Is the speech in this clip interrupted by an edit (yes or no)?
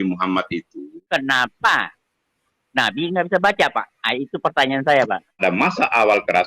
yes